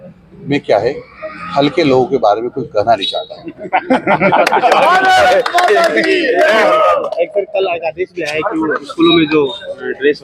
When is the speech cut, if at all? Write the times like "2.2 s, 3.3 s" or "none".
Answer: none